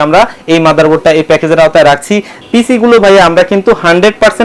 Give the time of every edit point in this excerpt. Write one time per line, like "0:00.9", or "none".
0:02.3